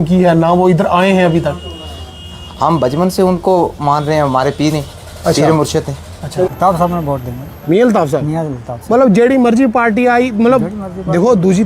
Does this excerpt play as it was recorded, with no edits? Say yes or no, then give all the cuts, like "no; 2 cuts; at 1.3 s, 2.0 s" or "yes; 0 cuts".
no; 1 cut; at 6.5 s